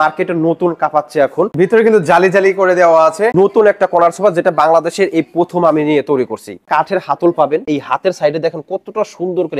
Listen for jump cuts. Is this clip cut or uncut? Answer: cut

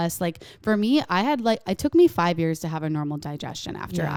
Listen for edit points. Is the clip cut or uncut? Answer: uncut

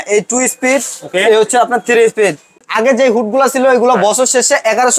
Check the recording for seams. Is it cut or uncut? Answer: cut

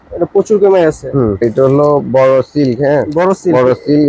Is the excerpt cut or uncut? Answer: cut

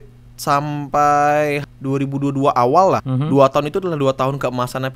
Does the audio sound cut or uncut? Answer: cut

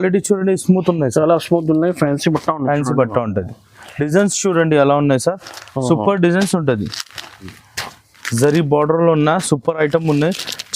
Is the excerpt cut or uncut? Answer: cut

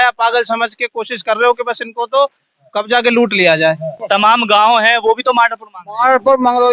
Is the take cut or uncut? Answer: cut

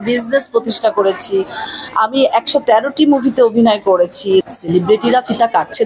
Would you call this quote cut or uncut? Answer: cut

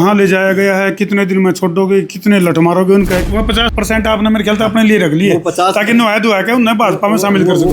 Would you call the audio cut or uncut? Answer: cut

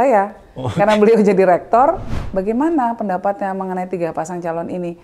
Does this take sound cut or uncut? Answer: cut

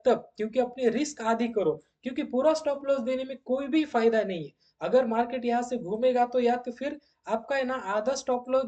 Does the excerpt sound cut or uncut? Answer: uncut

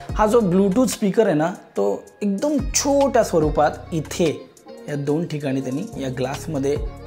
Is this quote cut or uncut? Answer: uncut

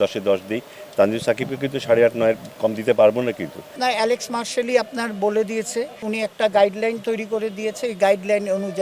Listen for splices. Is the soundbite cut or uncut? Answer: cut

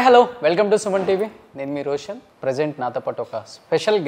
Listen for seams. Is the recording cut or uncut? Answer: cut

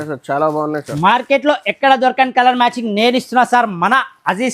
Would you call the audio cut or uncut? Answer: uncut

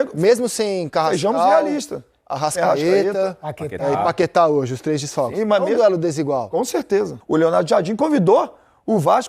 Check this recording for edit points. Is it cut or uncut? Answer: cut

